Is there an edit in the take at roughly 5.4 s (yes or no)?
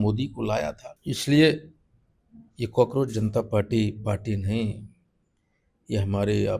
no